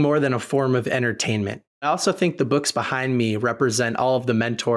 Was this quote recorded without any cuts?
no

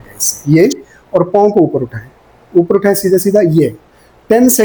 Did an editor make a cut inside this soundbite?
no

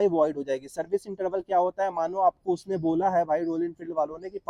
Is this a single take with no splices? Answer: yes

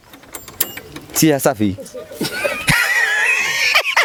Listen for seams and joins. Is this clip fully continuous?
yes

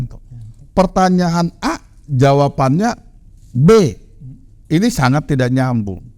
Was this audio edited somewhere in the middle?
yes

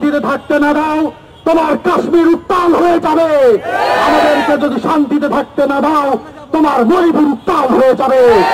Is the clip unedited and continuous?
yes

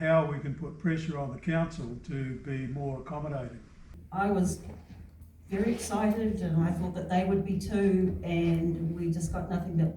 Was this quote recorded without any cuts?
no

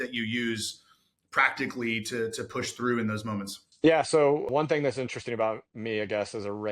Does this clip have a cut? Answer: yes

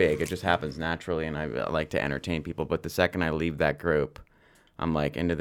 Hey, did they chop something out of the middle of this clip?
no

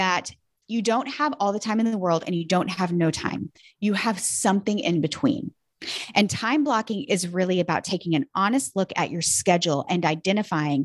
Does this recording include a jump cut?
no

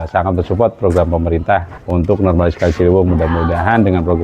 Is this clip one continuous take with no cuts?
no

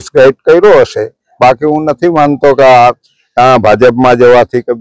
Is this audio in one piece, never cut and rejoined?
yes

